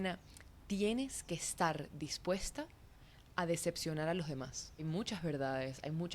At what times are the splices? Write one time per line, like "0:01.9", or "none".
0:04.8